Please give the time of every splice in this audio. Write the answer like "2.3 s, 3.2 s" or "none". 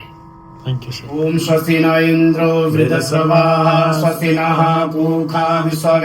1.0 s